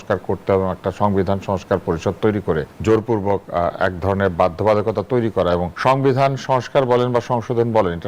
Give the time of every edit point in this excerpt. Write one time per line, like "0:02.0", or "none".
0:02.7
0:05.7

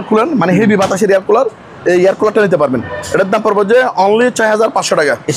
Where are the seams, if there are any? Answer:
none

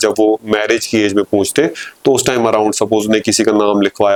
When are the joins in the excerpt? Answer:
none

